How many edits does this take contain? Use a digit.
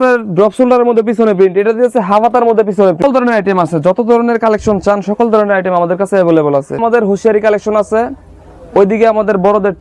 2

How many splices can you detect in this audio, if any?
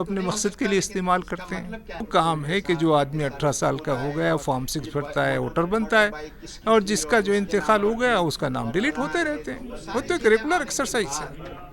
1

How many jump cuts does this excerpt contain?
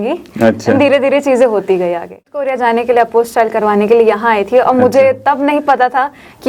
1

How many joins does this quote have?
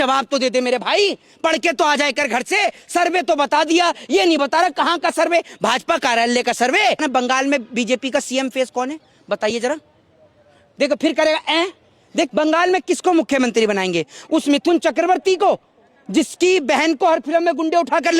2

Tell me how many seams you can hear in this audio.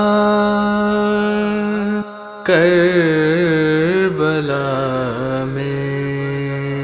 1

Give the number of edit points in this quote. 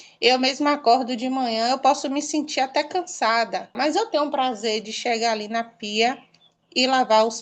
1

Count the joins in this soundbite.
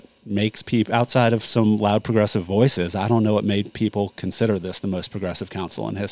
0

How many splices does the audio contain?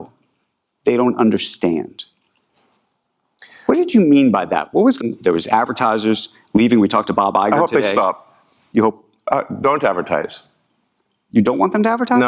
1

